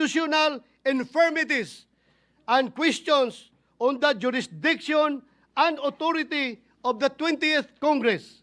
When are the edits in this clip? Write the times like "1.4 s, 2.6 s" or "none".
none